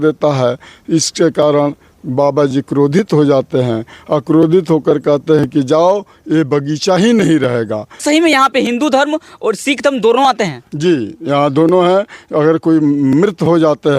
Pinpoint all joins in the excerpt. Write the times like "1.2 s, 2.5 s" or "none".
8.0 s